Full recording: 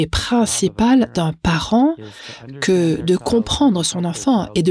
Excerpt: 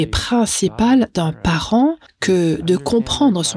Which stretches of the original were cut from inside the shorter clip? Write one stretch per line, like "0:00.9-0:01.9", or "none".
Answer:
0:02.1-0:02.5